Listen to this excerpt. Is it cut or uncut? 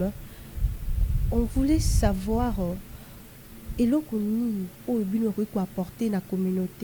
uncut